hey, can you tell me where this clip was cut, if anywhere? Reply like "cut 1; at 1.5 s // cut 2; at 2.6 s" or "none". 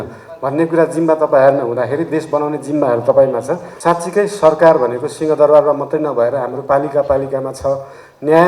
cut 1; at 3.7 s